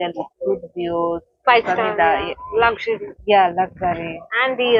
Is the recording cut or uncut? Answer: uncut